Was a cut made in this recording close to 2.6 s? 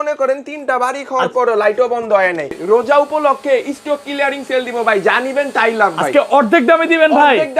yes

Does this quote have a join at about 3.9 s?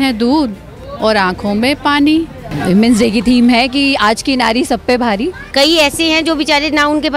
no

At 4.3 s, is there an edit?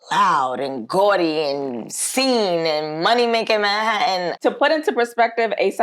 yes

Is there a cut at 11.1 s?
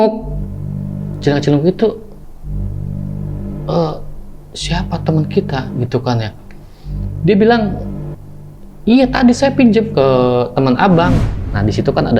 yes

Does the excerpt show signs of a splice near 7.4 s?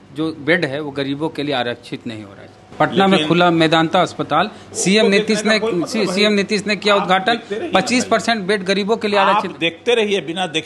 no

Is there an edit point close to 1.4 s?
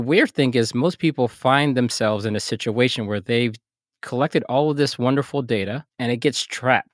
no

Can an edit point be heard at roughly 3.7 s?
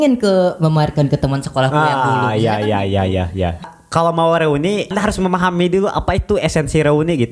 yes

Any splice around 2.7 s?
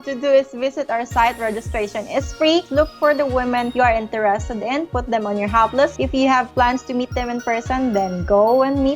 yes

